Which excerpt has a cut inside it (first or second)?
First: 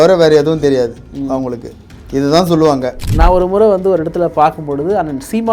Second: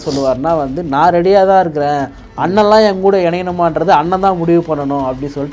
first